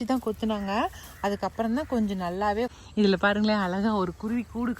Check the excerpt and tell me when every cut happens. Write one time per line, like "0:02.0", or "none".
0:02.7